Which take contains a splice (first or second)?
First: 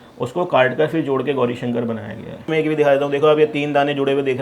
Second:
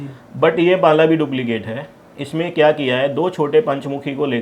first